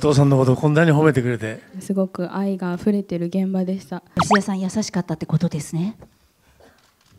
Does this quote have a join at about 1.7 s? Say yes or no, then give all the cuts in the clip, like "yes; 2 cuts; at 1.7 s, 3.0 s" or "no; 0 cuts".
yes; 2 cuts; at 1.7 s, 4.2 s